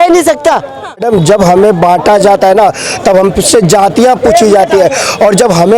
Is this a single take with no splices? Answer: no; 1 cut; at 1.0 s

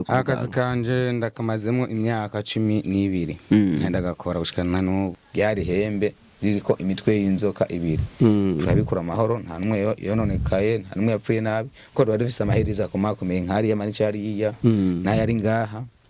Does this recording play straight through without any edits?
no; 1 cut; at 5.2 s

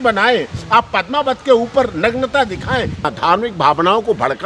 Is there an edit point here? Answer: yes; 1 cut; at 3.0 s

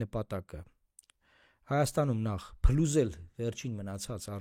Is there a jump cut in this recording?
no; 0 cuts

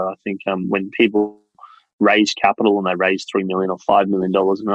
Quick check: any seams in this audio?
yes; 1 cut; at 1.5 s

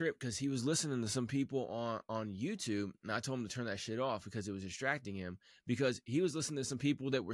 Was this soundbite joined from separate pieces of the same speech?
no; 0 cuts

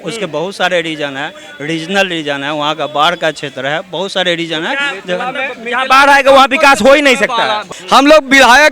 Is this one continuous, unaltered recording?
no; 1 cut; at 7.7 s

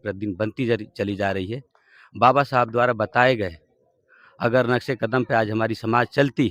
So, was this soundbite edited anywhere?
no; 0 cuts

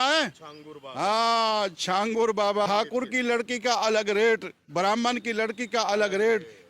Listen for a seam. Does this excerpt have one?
yes; 1 cut; at 2.7 s

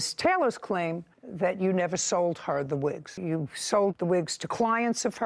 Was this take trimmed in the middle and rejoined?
yes; 1 cut; at 3.1 s

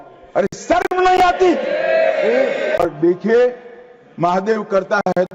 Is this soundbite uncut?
no; 1 cut; at 2.8 s

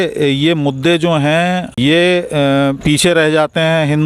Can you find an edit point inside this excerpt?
yes; 2 cuts; at 1.8 s, 2.8 s

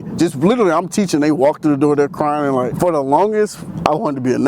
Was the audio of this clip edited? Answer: yes; 1 cut; at 2.7 s

